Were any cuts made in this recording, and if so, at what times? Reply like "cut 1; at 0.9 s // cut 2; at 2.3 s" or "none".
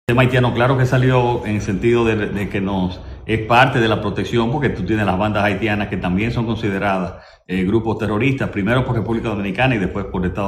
cut 1; at 1.0 s